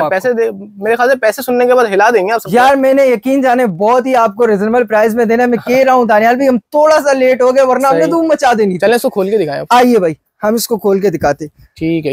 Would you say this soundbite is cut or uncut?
uncut